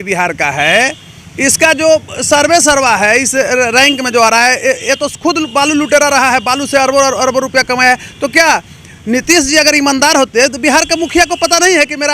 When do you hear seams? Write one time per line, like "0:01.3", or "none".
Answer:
none